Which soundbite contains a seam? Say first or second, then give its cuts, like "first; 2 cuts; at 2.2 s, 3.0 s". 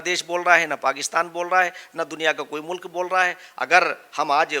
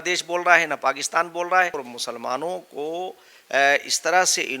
second; 1 cut; at 1.8 s